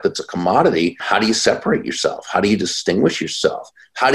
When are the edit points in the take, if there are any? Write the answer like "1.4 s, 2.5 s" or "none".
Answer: 1.0 s